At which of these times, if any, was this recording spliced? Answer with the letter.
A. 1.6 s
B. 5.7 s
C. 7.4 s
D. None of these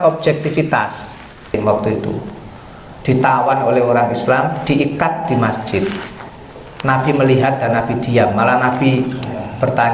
A